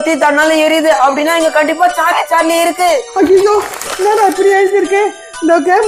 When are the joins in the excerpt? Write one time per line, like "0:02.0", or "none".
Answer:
0:03.1